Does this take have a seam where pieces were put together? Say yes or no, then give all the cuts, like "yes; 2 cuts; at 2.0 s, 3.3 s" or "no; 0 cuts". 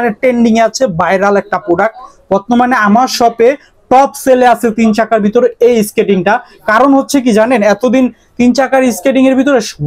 no; 0 cuts